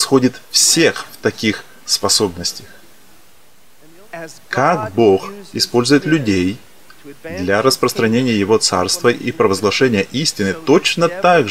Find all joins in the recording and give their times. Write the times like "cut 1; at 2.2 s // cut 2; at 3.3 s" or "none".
cut 1; at 3.6 s

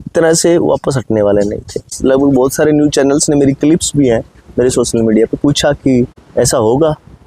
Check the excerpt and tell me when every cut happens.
cut 1; at 1.9 s // cut 2; at 6.2 s

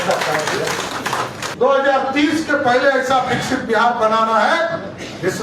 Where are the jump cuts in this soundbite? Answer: cut 1; at 1.4 s

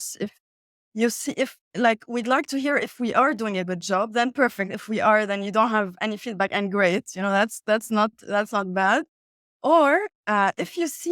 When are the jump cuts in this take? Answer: none

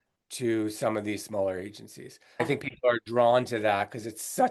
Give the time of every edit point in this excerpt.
cut 1; at 2.4 s

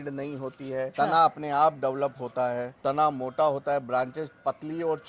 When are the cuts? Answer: cut 1; at 0.9 s // cut 2; at 2.8 s

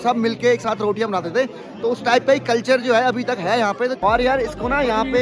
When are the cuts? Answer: cut 1; at 4.0 s

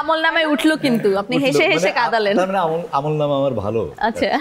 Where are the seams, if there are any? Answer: none

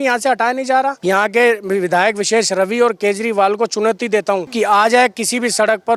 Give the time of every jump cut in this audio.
cut 1; at 1.0 s // cut 2; at 4.5 s

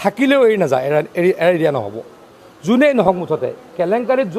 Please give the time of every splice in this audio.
none

